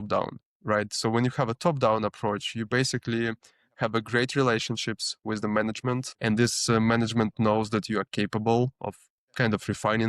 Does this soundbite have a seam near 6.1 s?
yes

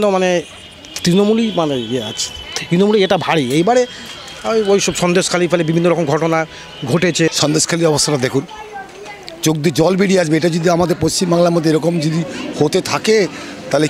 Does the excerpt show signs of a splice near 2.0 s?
no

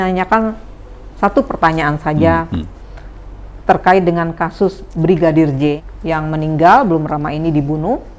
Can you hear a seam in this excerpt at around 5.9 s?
yes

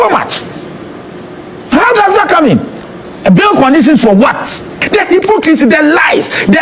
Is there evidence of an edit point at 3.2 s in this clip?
no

